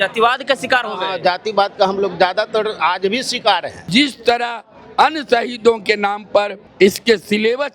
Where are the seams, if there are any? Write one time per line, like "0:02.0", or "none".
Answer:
0:03.9
0:06.6